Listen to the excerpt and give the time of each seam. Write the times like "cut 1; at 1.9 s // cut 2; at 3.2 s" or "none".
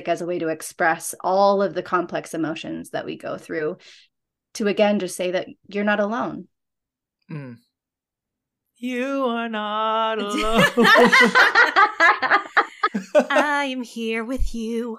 none